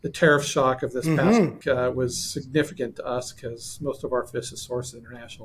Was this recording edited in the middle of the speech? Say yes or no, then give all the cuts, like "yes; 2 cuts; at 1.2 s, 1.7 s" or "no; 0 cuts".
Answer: yes; 1 cut; at 1.6 s